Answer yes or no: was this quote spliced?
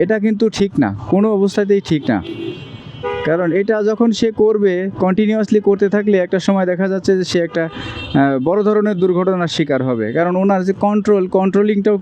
no